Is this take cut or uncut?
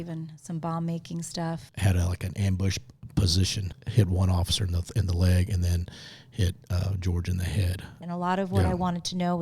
cut